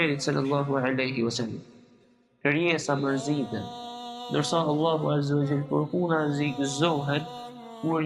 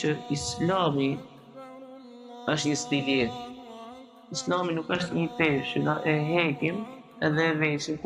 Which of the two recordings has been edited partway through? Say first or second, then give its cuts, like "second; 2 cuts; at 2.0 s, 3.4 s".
first; 1 cut; at 2.2 s